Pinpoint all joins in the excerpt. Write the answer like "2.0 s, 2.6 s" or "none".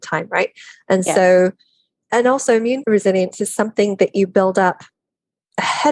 2.1 s, 2.8 s